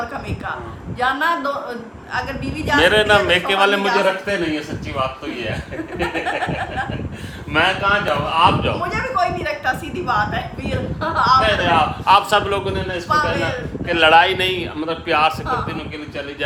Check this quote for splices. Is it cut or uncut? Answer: uncut